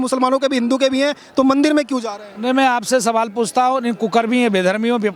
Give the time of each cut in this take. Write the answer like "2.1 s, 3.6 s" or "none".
none